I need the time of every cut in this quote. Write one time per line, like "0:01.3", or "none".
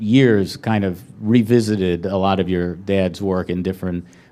0:03.4